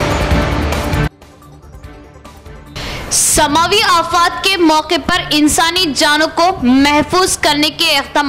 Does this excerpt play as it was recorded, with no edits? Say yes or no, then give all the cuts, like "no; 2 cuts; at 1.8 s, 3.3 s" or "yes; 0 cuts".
no; 1 cut; at 2.7 s